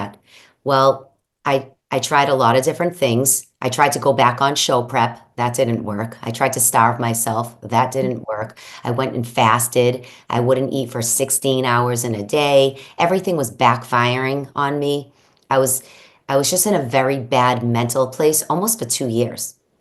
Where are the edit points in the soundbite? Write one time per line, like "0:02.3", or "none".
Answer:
none